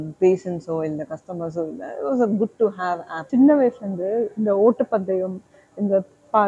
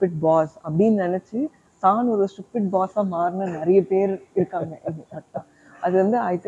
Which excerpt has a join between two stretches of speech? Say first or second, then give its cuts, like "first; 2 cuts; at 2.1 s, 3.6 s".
first; 1 cut; at 3.3 s